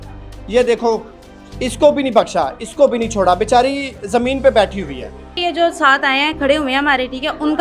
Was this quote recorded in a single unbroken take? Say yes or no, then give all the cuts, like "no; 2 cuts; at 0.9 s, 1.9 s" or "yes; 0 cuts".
no; 1 cut; at 5.4 s